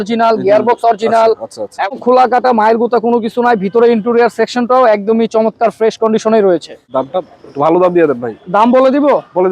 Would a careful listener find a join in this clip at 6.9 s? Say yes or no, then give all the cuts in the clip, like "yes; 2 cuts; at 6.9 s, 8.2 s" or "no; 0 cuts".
yes; 2 cuts; at 1.9 s, 6.9 s